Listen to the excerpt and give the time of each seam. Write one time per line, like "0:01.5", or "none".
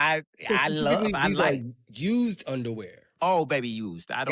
none